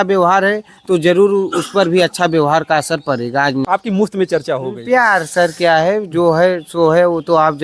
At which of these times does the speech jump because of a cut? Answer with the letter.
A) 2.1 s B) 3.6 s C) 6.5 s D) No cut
B